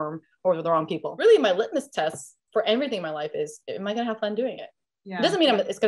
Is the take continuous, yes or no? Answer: no